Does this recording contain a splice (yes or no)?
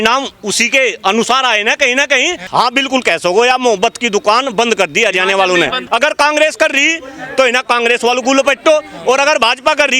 yes